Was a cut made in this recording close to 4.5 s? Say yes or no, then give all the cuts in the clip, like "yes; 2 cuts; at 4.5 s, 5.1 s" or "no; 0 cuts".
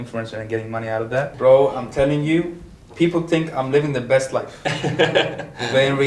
no; 1 cut; at 1.3 s